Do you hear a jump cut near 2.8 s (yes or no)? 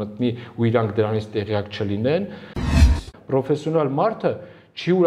yes